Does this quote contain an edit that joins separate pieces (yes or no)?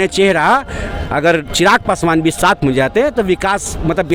no